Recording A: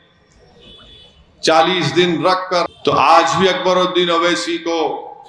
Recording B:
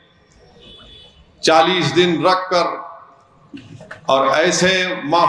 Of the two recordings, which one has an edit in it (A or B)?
A